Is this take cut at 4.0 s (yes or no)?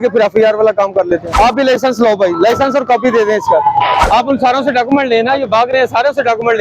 yes